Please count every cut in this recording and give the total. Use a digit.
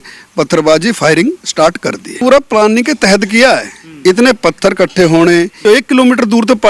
2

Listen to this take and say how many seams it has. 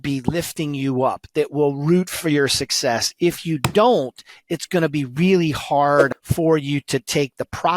1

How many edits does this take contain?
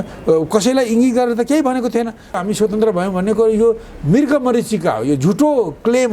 1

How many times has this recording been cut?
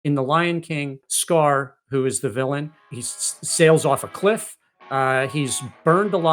2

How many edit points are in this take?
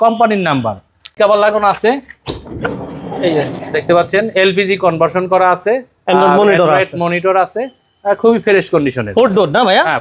1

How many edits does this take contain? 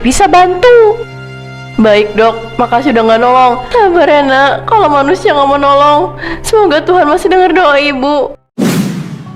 1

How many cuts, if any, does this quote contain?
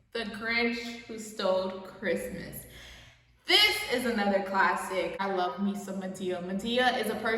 1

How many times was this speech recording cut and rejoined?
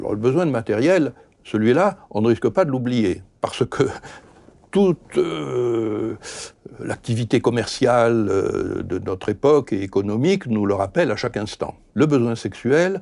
1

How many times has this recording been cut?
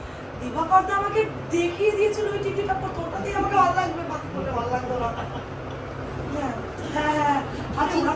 0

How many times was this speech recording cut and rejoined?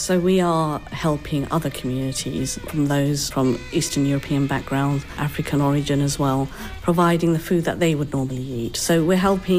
1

